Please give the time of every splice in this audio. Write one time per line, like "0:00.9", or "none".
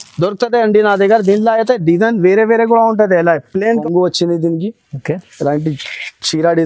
0:03.8